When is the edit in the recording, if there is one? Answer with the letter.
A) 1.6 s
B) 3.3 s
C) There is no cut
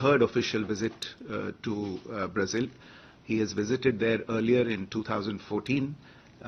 C